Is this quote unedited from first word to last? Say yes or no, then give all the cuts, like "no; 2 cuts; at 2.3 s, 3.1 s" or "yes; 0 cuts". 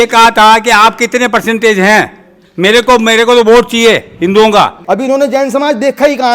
no; 1 cut; at 4.8 s